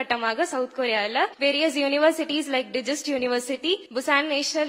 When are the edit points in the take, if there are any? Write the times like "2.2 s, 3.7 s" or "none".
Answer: 1.3 s, 3.9 s